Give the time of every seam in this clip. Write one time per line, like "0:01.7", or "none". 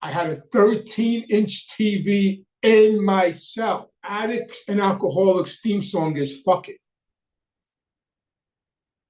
0:04.2